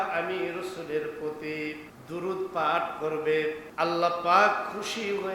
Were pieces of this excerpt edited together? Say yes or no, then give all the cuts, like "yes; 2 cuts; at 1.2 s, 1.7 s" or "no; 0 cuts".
yes; 2 cuts; at 1.9 s, 3.6 s